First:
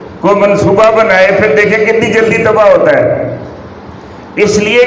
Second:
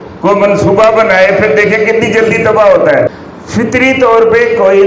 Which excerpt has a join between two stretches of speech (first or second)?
second